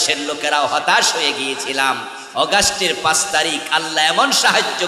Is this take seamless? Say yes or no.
yes